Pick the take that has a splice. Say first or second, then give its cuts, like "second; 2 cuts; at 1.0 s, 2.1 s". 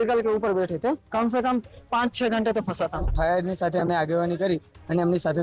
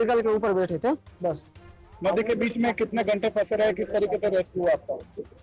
first; 2 cuts; at 1.0 s, 3.1 s